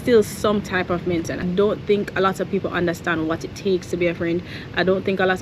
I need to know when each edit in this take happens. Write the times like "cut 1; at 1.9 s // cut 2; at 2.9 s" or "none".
cut 1; at 1.5 s